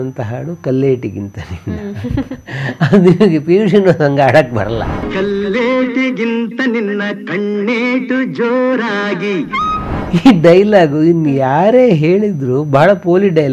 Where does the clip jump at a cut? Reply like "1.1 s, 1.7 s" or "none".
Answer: 5.0 s, 10.1 s